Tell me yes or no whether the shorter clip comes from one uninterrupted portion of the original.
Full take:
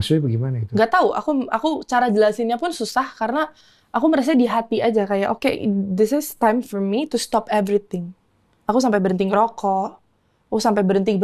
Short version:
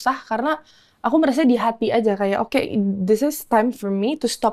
yes